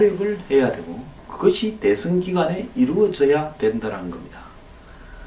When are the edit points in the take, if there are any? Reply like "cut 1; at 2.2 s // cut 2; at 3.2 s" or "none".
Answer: none